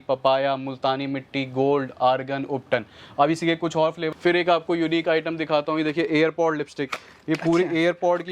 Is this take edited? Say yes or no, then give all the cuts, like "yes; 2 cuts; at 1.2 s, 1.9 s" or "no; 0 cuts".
yes; 1 cut; at 4.0 s